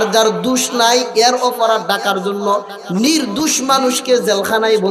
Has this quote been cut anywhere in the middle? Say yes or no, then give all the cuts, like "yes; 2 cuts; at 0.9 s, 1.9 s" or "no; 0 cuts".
no; 0 cuts